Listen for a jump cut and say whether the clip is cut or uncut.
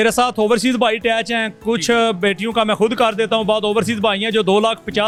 uncut